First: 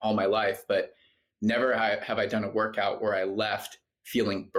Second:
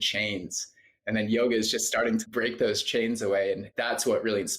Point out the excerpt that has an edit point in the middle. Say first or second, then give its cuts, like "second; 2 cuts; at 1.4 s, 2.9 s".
second; 2 cuts; at 2.2 s, 3.7 s